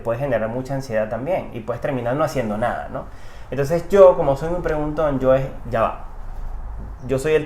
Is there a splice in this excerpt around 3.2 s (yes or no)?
no